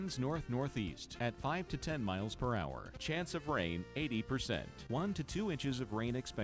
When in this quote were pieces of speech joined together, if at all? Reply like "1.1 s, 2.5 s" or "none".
1.0 s, 2.9 s